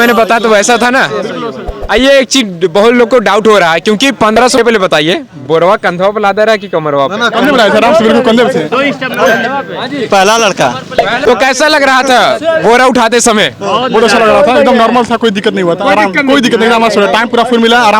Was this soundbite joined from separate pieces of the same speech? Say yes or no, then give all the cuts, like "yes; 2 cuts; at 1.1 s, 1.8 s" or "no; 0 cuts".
yes; 2 cuts; at 4.6 s, 11.2 s